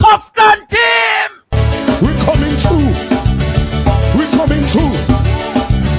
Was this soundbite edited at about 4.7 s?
no; 1 cut; at 1.4 s

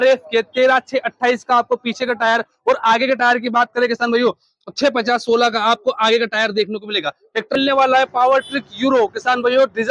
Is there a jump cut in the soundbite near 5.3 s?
no; 1 cut; at 7.6 s

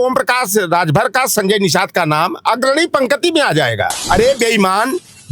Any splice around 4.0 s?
yes; 1 cut; at 4.0 s

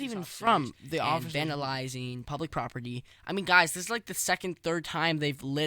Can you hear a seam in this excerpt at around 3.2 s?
no; 1 cut; at 1.3 s

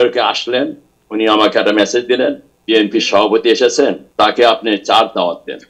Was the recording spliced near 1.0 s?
no; 2 cuts; at 2.5 s, 4.0 s

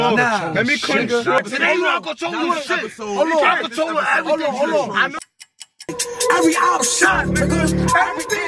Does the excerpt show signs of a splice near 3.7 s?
no; 2 cuts; at 1.4 s, 5.1 s

